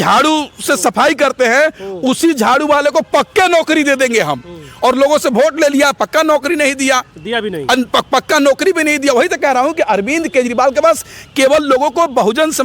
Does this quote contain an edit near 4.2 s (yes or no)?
no